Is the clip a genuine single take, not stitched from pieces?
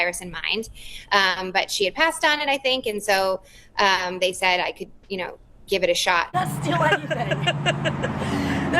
no; 1 cut; at 6.3 s

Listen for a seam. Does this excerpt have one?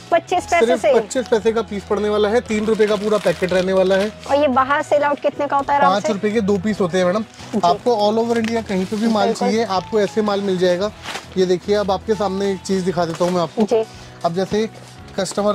no; 0 cuts

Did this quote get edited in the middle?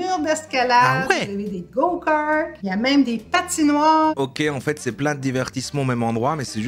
yes; 2 cuts; at 2.6 s, 4.1 s

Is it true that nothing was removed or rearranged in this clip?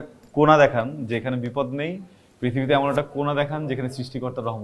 yes; 0 cuts

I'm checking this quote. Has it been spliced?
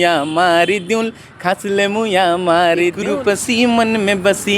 yes; 1 cut; at 3.0 s

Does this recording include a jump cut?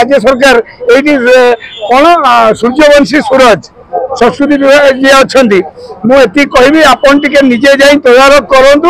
no; 0 cuts

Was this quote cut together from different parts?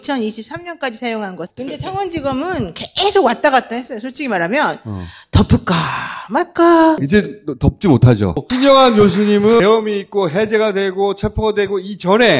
yes; 2 cuts; at 1.5 s, 8.4 s

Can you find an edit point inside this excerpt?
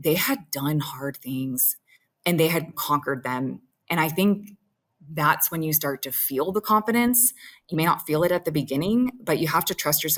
no; 0 cuts

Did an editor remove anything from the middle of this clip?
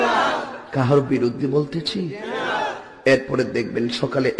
no; 0 cuts

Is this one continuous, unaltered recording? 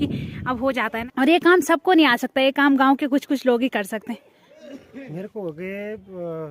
no; 2 cuts; at 1.0 s, 4.5 s

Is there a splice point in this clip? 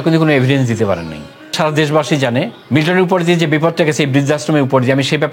yes; 2 cuts; at 1.5 s, 2.6 s

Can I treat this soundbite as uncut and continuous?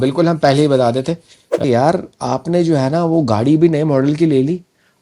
no; 1 cut; at 1.6 s

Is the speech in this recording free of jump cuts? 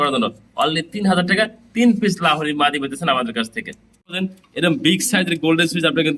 no; 1 cut; at 4.2 s

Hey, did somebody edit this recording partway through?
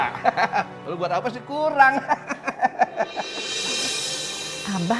no; 0 cuts

